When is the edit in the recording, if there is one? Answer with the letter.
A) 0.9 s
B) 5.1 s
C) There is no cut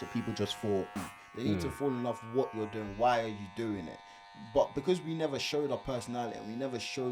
A